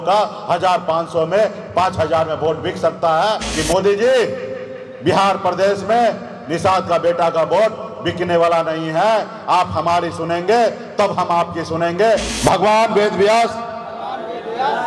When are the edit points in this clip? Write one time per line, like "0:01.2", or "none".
0:03.5
0:12.3